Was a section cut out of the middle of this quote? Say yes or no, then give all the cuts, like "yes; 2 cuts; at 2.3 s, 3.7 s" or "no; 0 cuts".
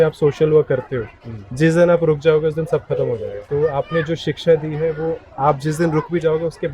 yes; 1 cut; at 3.3 s